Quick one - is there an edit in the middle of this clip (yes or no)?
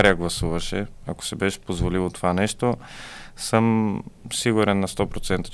no